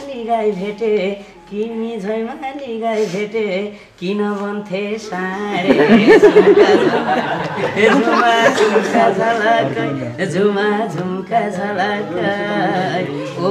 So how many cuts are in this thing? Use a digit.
0